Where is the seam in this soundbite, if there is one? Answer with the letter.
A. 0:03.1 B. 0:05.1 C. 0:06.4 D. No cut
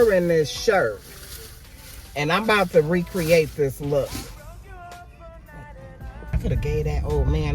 C